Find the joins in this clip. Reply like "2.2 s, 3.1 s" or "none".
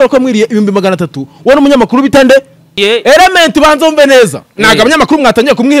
2.6 s

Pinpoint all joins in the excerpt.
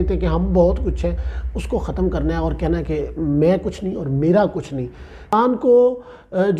5.3 s

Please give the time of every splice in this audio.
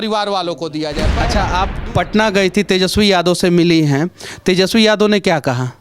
1.2 s

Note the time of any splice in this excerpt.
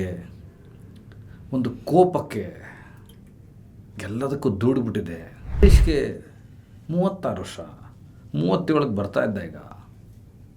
5.6 s

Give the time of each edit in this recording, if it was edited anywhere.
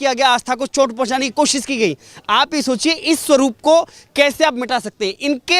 none

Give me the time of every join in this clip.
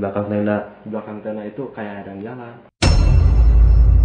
2.8 s

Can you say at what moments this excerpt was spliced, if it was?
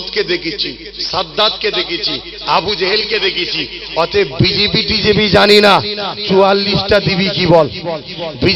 none

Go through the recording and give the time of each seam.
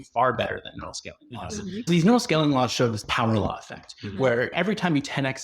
1.9 s, 4.5 s

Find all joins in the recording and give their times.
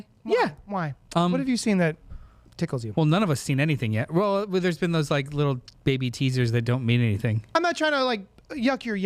1.0 s, 7.5 s

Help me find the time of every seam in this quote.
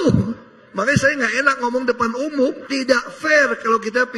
none

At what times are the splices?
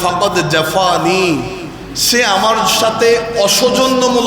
none

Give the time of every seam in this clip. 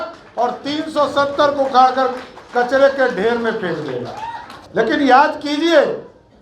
4.5 s

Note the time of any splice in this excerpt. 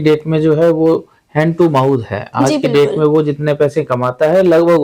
none

